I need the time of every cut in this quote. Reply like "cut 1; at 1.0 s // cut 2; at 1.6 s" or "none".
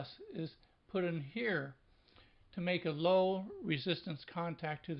cut 1; at 1.5 s